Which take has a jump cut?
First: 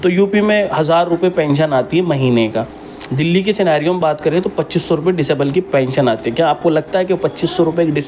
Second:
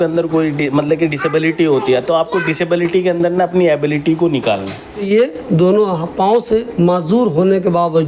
second; 1 cut; at 5.0 s

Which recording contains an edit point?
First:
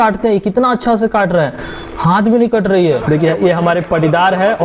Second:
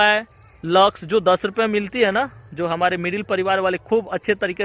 first; 1 cut; at 3.0 s

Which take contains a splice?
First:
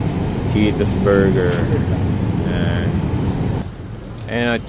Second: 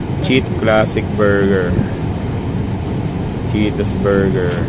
first; 1 cut; at 3.6 s

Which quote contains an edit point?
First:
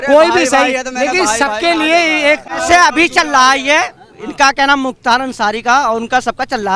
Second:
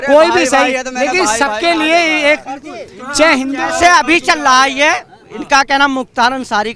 first; 1 cut; at 2.5 s

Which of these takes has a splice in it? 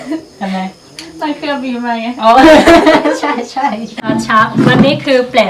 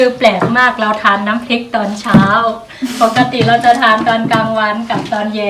first; 1 cut; at 3.9 s

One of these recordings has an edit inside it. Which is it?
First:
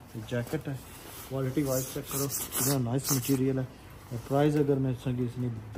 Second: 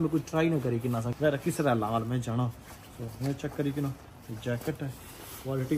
second; 1 cut; at 1.1 s

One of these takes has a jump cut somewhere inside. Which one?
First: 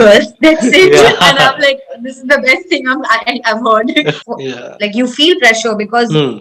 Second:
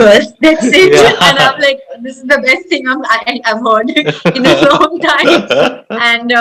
first; 1 cut; at 4.2 s

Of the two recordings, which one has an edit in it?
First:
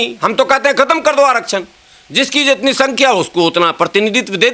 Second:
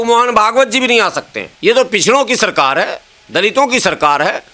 second; 1 cut; at 1.5 s

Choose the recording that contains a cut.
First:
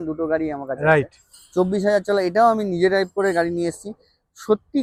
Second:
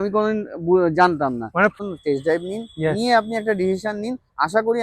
second; 1 cut; at 1.8 s

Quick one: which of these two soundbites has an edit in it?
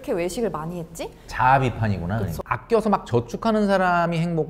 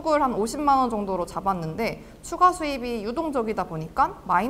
first; 1 cut; at 2.4 s

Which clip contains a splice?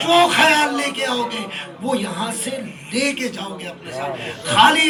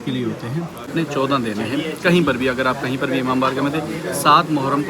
second; 1 cut; at 0.9 s

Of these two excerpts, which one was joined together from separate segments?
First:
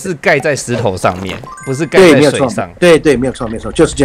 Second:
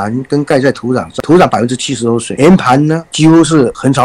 second; 2 cuts; at 1.2 s, 2.3 s

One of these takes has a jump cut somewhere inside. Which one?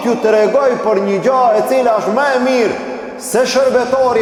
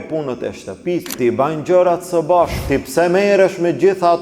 second; 2 cuts; at 1.0 s, 2.6 s

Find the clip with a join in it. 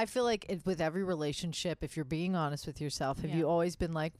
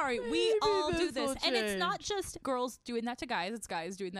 second; 1 cut; at 2.4 s

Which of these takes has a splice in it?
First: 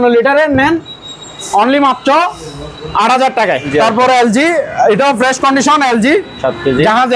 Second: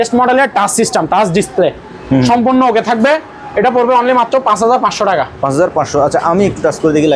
first; 1 cut; at 3.7 s

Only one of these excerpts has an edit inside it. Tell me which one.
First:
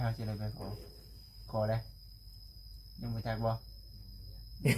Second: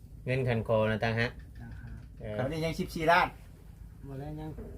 second; 1 cut; at 2.4 s

